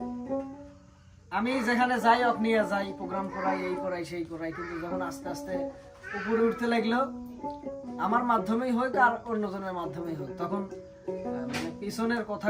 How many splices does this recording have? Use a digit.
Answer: 0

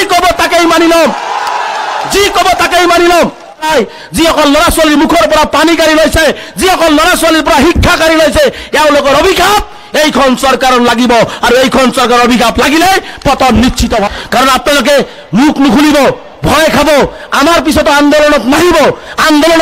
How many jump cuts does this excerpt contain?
2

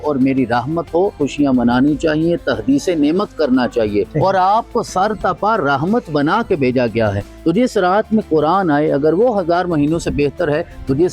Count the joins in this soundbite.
3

